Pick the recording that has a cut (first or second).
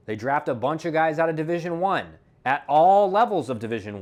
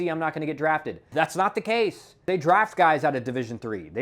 second